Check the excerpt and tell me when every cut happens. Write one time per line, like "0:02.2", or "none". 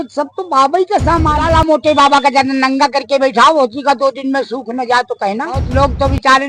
0:01.4
0:05.7